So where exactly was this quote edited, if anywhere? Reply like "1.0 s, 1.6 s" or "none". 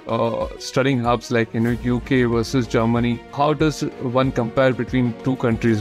3.3 s